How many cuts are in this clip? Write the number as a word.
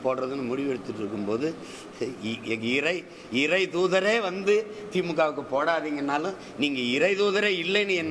zero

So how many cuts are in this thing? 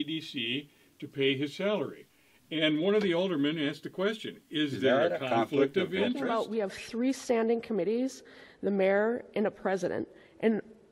one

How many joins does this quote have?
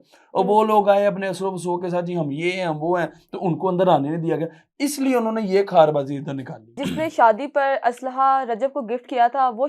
one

